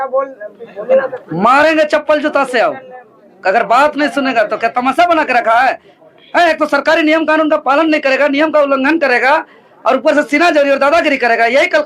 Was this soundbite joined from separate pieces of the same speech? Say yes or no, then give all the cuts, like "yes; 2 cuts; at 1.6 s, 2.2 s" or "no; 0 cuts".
no; 0 cuts